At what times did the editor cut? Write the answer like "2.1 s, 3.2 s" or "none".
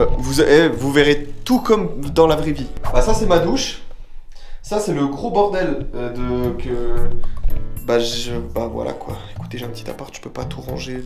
none